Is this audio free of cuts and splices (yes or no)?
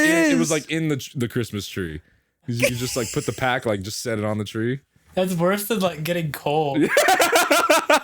yes